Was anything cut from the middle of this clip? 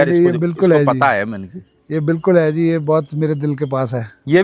no; 0 cuts

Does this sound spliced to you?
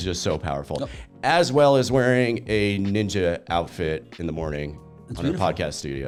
no; 0 cuts

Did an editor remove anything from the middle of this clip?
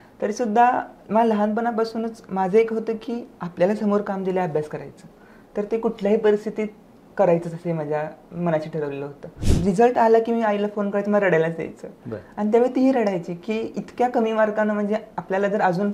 yes; 1 cut; at 9.4 s

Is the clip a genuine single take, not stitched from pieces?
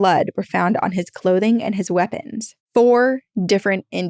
yes; 0 cuts

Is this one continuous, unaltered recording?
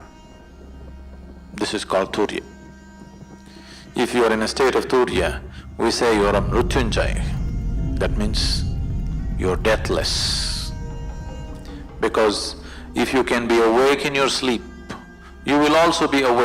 yes; 0 cuts

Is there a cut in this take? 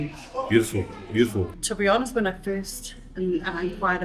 yes; 1 cut; at 1.5 s

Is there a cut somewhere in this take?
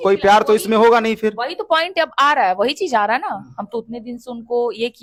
no; 0 cuts

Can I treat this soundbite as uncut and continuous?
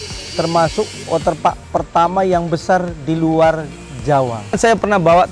no; 2 cuts; at 1.0 s, 4.6 s

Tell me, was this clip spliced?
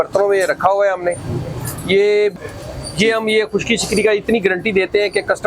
yes; 1 cut; at 2.3 s

